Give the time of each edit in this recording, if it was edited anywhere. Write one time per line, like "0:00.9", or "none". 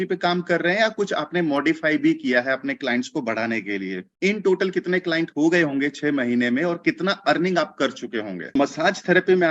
0:04.0
0:08.5